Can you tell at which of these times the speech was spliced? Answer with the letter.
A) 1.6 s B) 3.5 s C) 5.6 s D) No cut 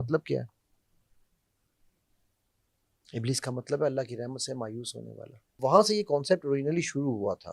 C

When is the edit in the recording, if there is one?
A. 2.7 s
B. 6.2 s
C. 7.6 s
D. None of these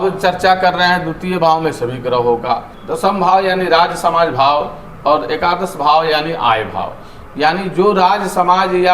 A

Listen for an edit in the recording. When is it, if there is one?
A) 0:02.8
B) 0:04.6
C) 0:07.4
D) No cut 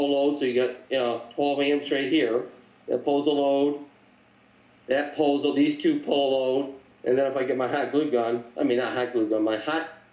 C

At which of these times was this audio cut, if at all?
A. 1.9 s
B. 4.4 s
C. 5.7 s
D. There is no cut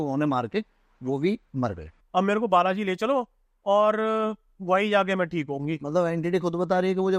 A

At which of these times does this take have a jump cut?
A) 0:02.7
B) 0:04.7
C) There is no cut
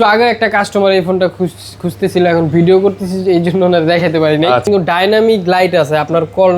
B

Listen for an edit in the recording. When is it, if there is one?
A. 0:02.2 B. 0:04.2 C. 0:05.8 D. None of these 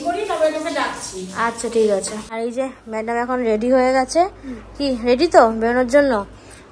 A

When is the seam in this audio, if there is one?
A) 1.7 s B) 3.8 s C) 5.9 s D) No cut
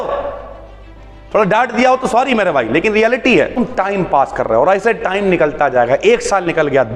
B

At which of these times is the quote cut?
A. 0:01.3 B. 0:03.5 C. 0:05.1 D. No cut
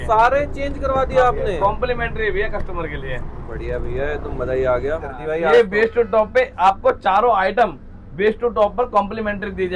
C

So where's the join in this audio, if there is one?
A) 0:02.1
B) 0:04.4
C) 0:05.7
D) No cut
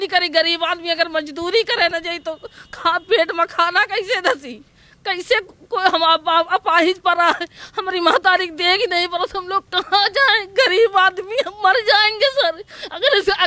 D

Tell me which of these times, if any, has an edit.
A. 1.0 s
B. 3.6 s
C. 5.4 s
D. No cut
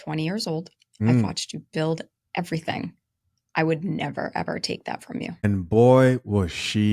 C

